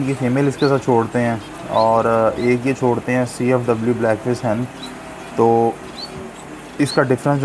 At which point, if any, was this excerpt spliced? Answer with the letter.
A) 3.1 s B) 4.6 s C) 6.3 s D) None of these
D